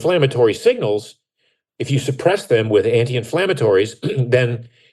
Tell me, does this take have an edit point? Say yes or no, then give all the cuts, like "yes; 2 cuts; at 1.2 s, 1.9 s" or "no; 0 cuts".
no; 0 cuts